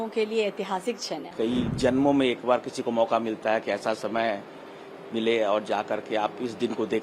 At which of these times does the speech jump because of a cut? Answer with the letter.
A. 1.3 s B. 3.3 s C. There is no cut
A